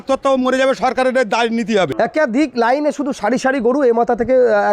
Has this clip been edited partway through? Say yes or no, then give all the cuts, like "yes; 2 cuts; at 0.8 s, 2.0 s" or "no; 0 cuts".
yes; 1 cut; at 1.9 s